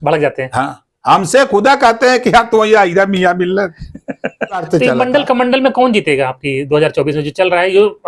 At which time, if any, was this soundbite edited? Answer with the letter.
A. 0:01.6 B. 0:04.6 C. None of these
B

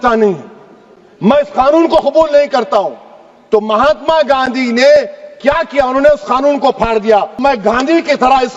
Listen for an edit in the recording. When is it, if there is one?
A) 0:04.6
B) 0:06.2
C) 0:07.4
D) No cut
C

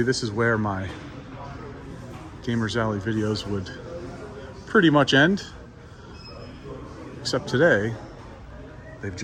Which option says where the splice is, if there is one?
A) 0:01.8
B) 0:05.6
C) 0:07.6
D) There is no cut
D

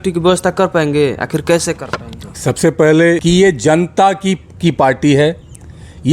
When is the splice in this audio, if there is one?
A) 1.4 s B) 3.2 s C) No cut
B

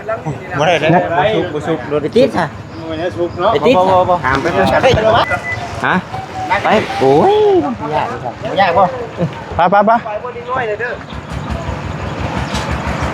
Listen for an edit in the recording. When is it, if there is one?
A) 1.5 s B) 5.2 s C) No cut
B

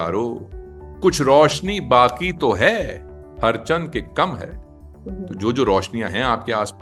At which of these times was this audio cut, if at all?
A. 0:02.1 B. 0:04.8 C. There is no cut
C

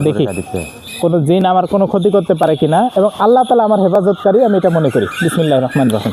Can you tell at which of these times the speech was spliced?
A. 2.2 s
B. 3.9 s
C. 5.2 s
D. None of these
D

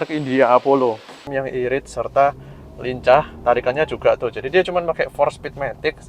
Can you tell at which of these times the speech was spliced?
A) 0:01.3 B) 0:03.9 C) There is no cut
A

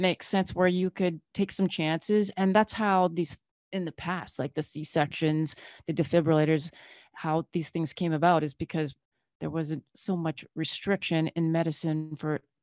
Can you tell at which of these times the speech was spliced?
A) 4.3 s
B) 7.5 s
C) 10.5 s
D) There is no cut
D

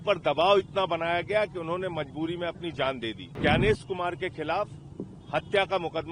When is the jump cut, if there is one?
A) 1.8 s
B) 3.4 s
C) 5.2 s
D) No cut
B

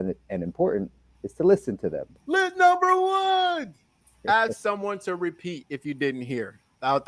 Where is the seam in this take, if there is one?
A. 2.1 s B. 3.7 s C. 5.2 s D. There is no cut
A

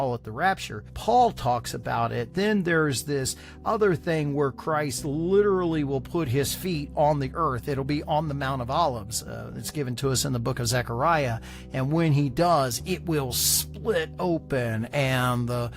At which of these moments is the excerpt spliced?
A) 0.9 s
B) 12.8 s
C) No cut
A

